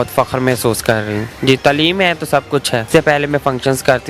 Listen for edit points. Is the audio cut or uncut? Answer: cut